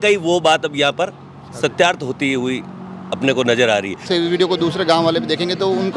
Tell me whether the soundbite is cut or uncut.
cut